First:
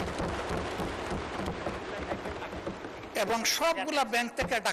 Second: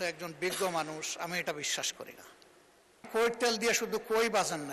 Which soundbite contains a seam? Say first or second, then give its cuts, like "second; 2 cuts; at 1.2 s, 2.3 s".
second; 1 cut; at 3.1 s